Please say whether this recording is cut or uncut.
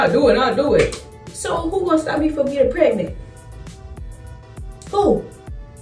uncut